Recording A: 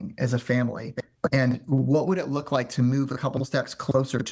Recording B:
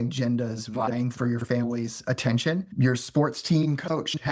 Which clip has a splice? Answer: B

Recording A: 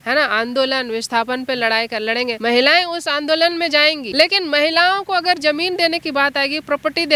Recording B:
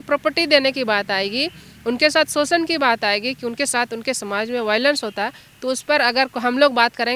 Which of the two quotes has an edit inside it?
A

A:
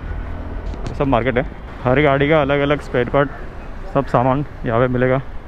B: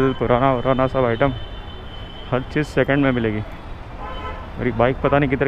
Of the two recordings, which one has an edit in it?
A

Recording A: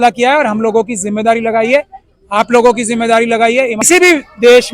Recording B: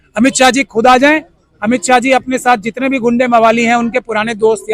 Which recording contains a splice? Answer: A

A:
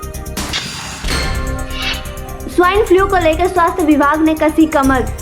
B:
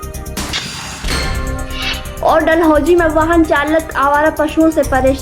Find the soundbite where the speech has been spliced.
A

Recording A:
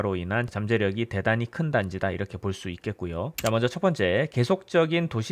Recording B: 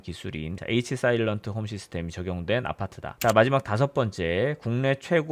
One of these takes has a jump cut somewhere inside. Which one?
A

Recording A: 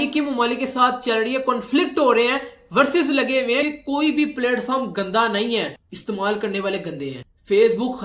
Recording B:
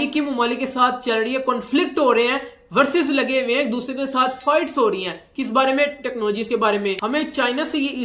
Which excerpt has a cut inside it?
A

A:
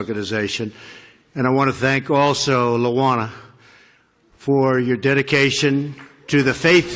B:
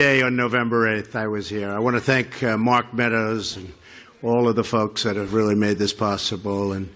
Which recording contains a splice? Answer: B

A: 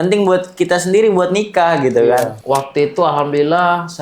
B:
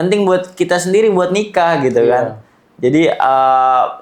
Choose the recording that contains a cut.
A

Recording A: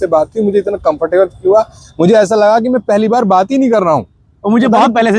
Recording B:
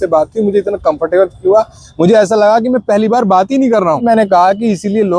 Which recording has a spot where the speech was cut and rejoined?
B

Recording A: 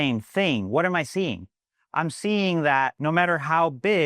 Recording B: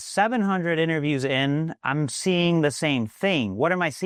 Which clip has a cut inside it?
A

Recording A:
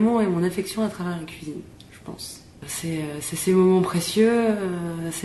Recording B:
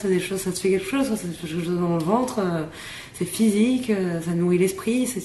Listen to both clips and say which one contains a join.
A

